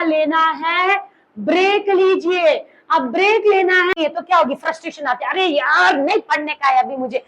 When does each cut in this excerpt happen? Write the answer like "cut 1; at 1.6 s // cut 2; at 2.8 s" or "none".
cut 1; at 4.0 s